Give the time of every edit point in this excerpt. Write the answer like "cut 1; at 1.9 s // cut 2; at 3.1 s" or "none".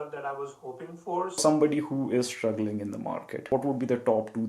cut 1; at 1.4 s // cut 2; at 3.4 s